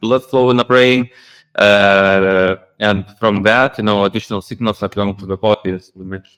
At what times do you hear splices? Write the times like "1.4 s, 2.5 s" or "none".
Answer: none